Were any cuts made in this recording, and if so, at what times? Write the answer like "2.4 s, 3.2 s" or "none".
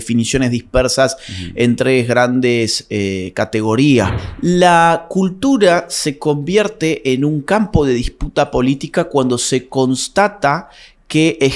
4.2 s

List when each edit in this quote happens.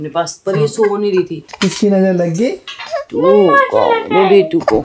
1.4 s

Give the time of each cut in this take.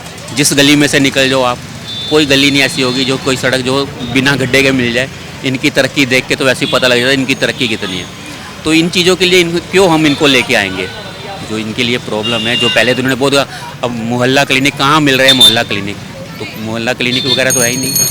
none

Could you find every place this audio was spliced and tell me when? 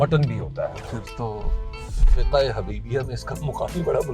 0.9 s

